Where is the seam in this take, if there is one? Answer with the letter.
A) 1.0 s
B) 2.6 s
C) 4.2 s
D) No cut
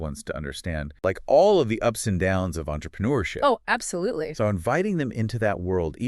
A